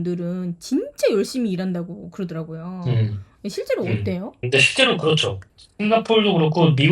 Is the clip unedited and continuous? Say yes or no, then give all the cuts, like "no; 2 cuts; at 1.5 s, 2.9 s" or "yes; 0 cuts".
yes; 0 cuts